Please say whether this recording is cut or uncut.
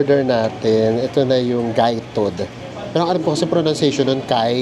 uncut